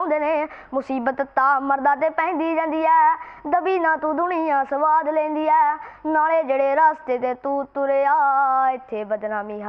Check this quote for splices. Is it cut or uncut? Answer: uncut